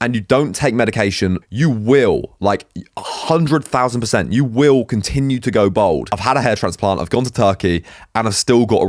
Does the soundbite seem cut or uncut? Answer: cut